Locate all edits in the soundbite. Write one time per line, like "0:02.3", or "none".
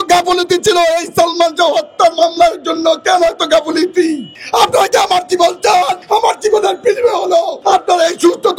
0:04.3
0:06.0
0:07.5